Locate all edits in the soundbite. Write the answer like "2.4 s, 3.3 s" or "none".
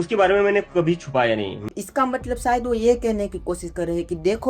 1.6 s